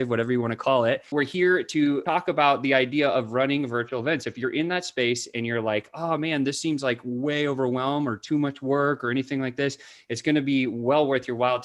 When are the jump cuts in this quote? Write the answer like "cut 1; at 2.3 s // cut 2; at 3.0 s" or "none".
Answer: cut 1; at 1.1 s // cut 2; at 2.0 s